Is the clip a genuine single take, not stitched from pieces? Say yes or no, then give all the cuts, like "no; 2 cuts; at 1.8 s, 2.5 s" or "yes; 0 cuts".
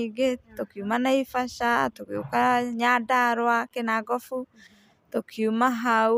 yes; 0 cuts